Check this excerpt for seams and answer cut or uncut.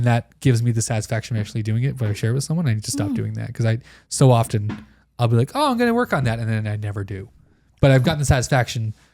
cut